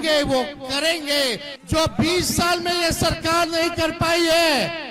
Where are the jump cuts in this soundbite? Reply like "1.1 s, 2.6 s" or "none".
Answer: 1.5 s